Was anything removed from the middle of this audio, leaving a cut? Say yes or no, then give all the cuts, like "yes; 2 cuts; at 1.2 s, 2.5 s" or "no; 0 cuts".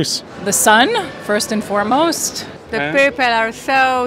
yes; 1 cut; at 2.5 s